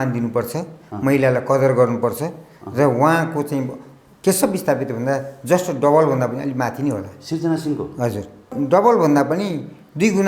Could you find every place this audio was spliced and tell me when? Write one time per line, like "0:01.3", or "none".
0:08.5